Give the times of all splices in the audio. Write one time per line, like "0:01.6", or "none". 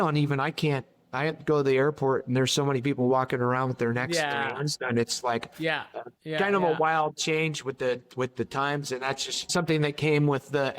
0:05.5
0:09.5